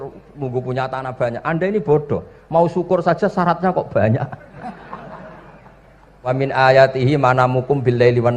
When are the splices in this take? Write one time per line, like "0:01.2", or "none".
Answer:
0:06.3

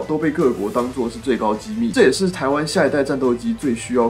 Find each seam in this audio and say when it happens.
0:01.9

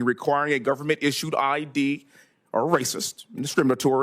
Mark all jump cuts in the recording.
none

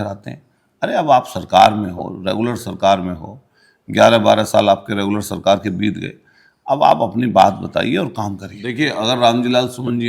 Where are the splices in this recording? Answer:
0:08.7

